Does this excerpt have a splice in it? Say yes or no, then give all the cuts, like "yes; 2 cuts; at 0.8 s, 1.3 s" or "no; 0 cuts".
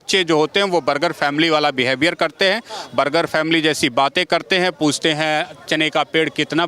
no; 0 cuts